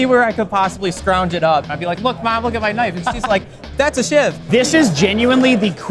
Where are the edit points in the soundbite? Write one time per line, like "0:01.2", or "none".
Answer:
0:01.7
0:04.4